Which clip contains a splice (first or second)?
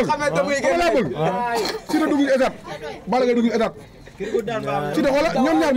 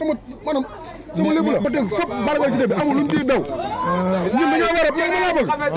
second